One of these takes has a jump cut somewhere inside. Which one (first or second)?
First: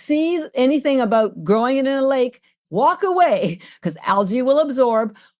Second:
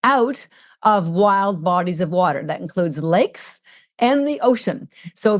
first